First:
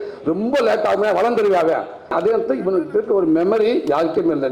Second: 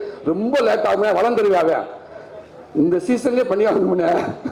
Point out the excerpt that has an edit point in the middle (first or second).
first